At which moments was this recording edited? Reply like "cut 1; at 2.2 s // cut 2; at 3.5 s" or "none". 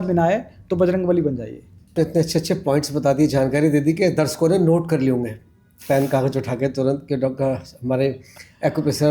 cut 1; at 1.9 s